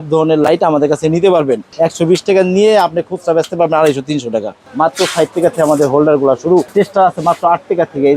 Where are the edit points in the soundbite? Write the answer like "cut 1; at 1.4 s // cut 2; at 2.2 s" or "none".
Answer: cut 1; at 1.7 s // cut 2; at 4.6 s // cut 3; at 6.7 s